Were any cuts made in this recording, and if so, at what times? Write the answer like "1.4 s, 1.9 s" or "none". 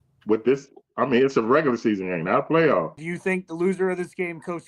3.0 s